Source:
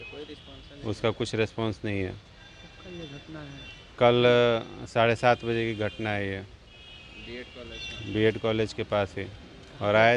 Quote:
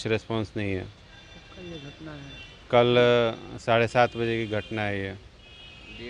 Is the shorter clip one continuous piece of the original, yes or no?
yes